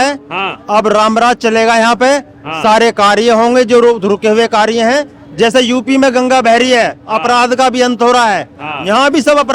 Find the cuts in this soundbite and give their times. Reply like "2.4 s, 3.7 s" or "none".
none